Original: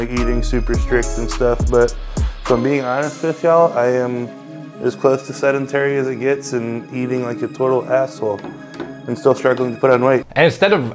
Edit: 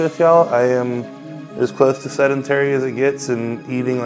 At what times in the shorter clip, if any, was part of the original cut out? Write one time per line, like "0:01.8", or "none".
none